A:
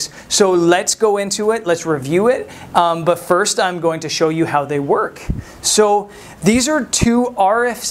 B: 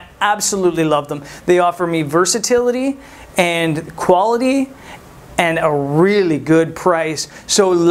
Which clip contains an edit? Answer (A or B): A